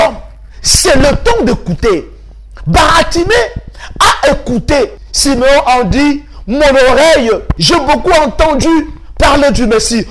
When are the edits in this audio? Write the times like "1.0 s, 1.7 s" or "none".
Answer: 4.9 s, 7.5 s